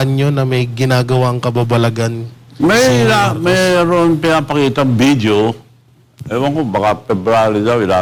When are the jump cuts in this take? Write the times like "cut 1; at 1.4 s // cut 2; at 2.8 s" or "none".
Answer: none